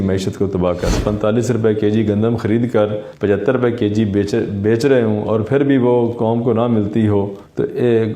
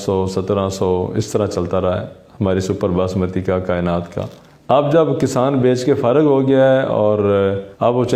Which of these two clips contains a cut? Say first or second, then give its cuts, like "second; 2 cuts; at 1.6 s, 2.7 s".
first; 1 cut; at 1.0 s